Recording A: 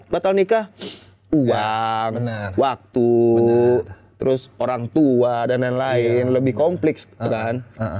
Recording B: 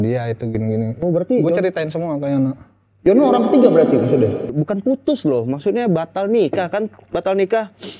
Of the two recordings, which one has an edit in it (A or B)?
B